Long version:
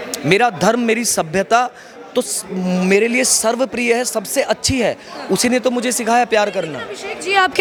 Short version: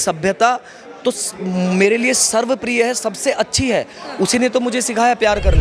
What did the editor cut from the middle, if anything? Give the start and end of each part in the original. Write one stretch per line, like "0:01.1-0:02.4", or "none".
none